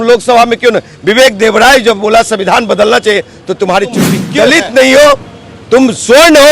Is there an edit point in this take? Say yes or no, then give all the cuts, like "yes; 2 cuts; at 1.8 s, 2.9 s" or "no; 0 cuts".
yes; 1 cut; at 4.2 s